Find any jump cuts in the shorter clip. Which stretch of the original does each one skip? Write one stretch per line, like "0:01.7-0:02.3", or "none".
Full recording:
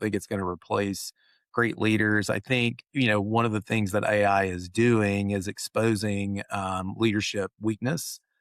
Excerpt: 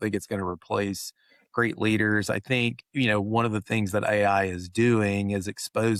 none